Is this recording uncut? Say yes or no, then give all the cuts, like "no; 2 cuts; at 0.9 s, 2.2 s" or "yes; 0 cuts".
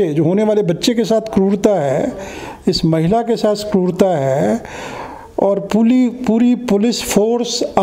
yes; 0 cuts